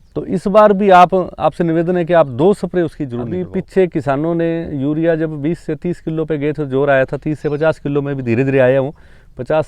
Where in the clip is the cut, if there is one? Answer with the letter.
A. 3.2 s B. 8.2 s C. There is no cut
A